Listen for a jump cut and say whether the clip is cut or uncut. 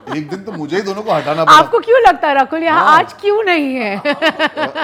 uncut